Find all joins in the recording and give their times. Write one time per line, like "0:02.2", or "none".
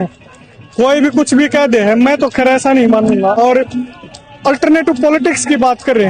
0:03.4